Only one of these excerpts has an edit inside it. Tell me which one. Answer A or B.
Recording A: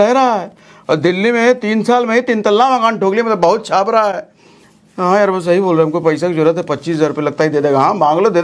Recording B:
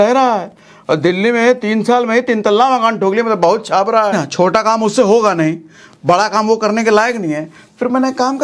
B